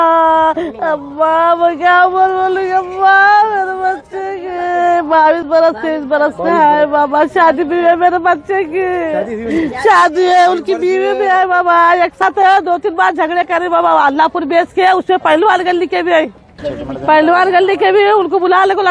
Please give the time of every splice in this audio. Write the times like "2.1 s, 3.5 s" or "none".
12.2 s, 16.7 s